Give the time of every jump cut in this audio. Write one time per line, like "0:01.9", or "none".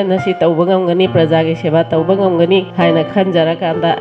0:03.0